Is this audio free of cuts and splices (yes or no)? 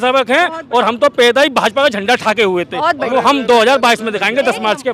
yes